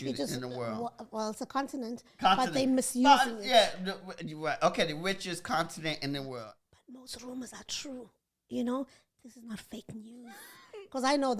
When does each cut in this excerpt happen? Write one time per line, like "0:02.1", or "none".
0:06.6